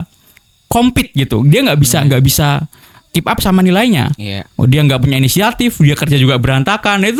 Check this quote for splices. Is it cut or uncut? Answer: uncut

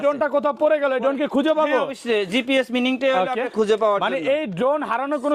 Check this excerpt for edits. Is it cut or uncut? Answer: uncut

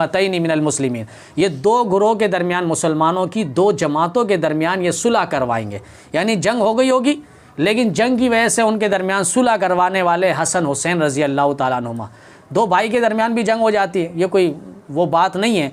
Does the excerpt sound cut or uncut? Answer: uncut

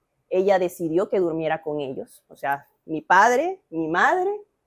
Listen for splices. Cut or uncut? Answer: uncut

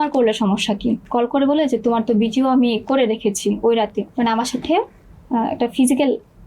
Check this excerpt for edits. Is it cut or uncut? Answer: cut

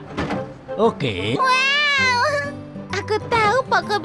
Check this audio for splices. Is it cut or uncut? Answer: cut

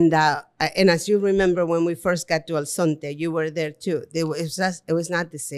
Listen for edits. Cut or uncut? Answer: uncut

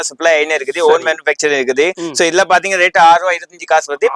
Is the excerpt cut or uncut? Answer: uncut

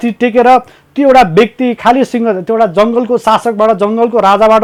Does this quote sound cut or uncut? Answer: uncut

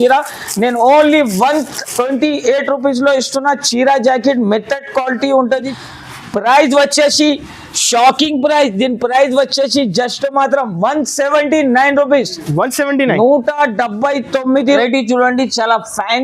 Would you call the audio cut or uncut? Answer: cut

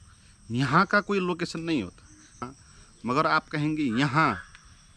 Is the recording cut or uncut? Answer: cut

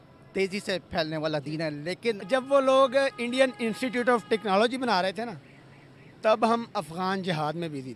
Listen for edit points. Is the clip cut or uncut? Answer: cut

